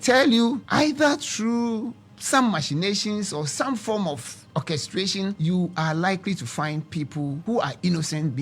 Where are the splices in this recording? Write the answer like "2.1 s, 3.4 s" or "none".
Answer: 4.3 s, 5.4 s, 7.4 s